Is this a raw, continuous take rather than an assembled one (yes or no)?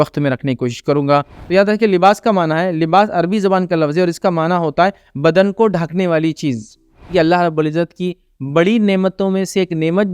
no